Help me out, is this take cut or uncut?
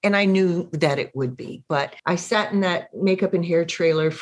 cut